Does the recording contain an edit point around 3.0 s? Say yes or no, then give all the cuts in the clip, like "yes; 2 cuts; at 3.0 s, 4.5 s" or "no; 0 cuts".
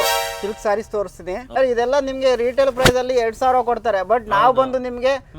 no; 1 cut; at 1.6 s